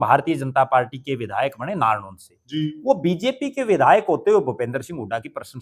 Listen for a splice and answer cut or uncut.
uncut